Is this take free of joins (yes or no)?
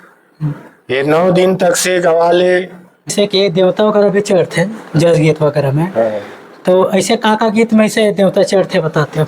no